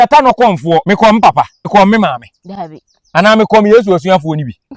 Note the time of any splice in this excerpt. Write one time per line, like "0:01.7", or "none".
0:00.8
0:01.7